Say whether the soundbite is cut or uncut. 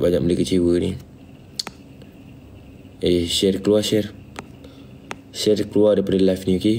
uncut